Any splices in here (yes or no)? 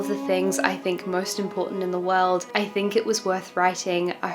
no